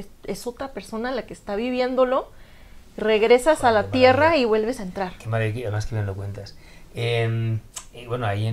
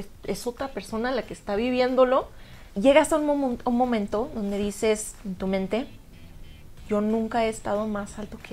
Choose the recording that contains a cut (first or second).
second